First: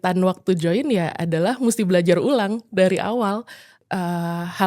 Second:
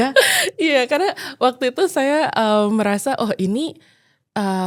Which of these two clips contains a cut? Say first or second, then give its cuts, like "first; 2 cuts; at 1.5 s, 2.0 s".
first; 1 cut; at 3.7 s